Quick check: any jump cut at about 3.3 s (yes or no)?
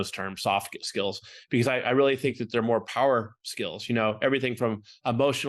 no